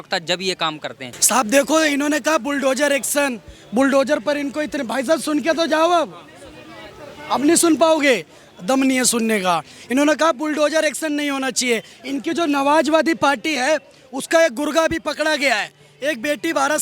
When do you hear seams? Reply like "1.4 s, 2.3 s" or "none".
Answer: 1.1 s